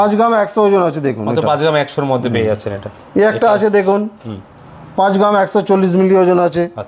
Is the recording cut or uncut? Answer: uncut